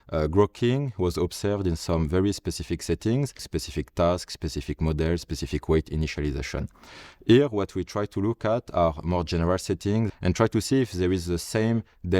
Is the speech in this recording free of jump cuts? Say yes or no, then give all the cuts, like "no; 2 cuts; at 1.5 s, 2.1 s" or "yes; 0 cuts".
no; 2 cuts; at 3.5 s, 10.1 s